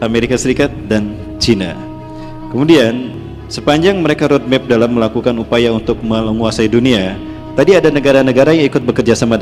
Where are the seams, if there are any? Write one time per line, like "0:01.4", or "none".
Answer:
none